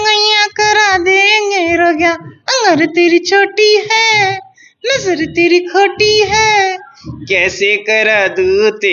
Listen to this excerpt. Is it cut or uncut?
uncut